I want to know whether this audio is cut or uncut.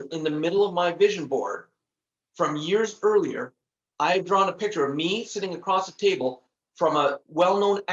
uncut